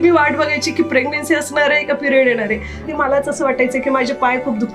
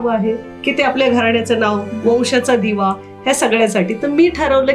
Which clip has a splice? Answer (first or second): first